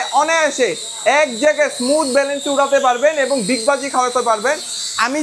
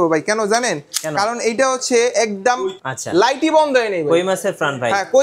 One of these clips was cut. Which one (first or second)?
second